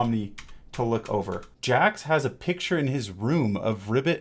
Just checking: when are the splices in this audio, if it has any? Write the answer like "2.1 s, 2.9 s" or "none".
1.5 s